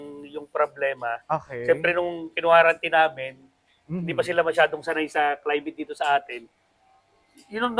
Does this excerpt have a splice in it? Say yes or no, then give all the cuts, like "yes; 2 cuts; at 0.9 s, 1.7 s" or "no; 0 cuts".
no; 0 cuts